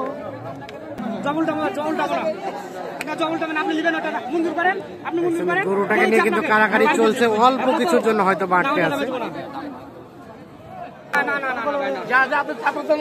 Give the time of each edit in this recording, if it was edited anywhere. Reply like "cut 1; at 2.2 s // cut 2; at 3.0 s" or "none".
cut 1; at 1.0 s // cut 2; at 11.1 s